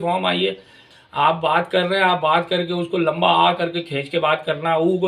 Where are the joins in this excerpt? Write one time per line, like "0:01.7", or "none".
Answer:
0:00.9